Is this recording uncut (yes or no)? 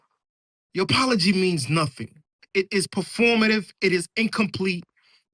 yes